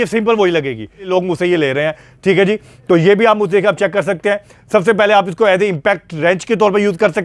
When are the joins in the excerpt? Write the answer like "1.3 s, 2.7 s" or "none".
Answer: 1.1 s